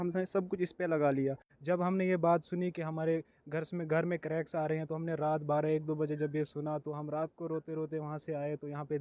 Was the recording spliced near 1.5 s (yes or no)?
yes